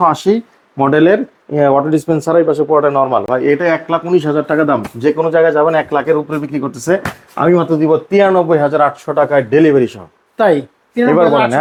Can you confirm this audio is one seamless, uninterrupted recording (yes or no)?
yes